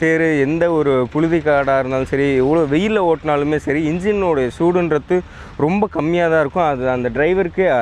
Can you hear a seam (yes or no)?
no